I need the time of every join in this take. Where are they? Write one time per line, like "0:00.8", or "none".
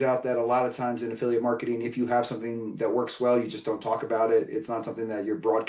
none